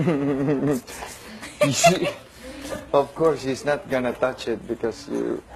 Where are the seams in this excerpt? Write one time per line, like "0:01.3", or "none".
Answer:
none